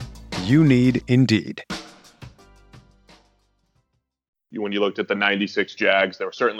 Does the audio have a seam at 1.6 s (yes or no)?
no